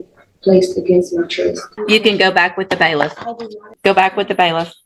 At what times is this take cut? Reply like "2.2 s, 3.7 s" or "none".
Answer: 1.7 s, 3.7 s

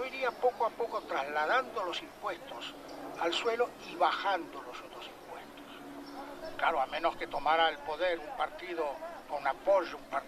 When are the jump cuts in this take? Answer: 2.0 s

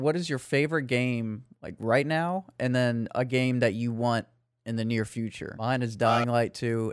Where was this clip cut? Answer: 5.5 s

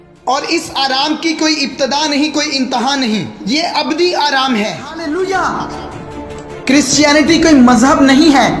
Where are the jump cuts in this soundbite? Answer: 4.9 s

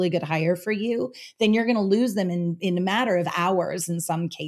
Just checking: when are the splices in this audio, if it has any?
none

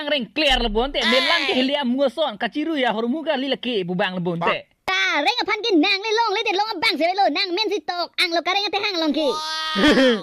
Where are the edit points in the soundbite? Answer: 5.0 s

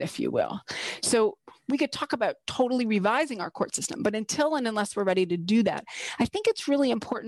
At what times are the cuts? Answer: 1.4 s

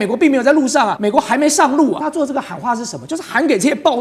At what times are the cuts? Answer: 0.9 s, 2.1 s

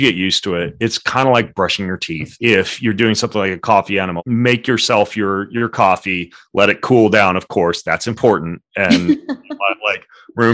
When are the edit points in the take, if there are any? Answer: 2.2 s, 4.1 s

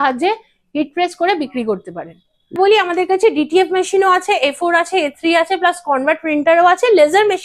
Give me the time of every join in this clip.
2.5 s

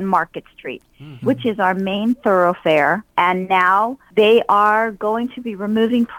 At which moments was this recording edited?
3.1 s, 4.0 s

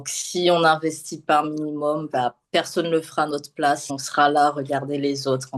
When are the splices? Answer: 4.0 s

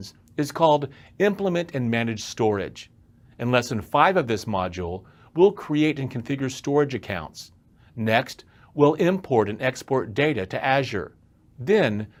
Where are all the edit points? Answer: none

